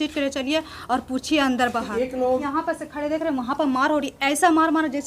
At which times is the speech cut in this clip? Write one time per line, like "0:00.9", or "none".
0:02.4